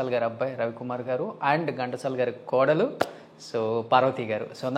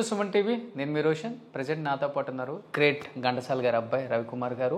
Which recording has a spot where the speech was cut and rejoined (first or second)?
second